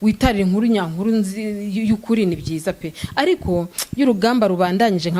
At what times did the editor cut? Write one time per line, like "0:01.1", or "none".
none